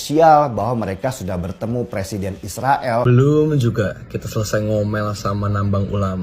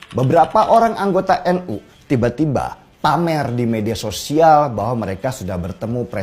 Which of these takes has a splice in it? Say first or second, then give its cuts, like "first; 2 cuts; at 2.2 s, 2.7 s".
first; 1 cut; at 3.0 s